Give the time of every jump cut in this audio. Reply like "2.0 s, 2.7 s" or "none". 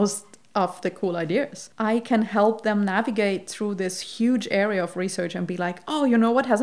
1.6 s